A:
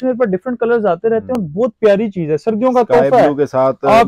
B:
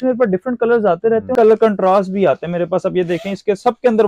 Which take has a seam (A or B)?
B